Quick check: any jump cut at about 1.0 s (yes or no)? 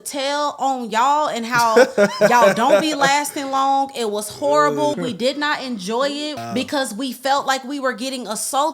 no